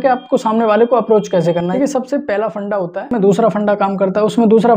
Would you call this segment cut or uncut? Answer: cut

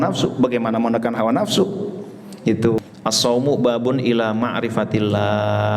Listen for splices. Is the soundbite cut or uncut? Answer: cut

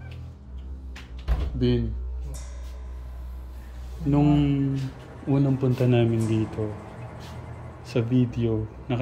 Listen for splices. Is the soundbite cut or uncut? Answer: uncut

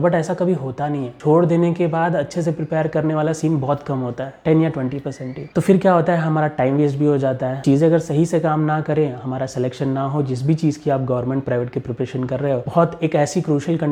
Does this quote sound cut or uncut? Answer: uncut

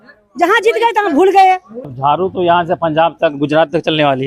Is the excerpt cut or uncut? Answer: cut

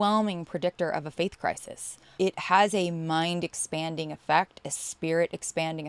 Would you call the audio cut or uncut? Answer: cut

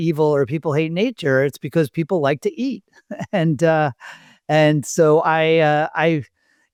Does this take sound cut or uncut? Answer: uncut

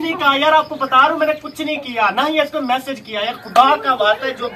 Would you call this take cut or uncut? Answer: uncut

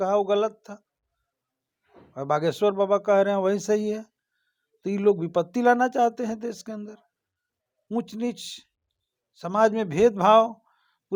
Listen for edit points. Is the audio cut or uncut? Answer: uncut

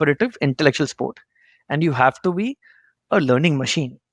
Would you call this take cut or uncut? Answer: uncut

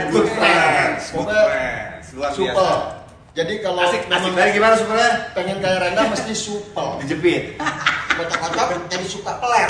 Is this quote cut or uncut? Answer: uncut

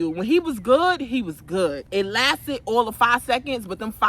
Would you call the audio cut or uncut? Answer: cut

